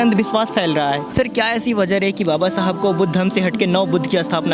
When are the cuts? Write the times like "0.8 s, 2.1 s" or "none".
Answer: 1.1 s